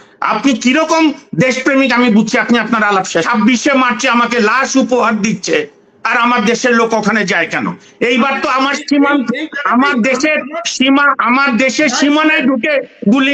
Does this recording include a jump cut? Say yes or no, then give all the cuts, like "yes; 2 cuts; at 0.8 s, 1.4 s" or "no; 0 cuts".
yes; 1 cut; at 3.3 s